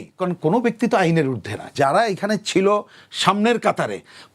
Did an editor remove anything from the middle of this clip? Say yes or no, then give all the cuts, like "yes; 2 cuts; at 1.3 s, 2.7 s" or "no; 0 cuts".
yes; 1 cut; at 1.7 s